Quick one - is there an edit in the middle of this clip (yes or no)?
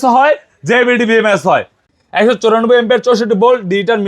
yes